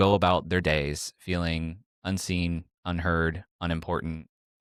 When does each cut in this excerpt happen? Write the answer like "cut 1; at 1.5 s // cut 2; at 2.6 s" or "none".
none